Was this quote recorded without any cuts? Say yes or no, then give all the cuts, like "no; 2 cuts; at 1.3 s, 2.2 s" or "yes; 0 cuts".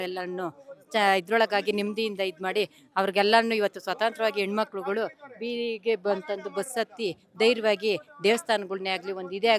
yes; 0 cuts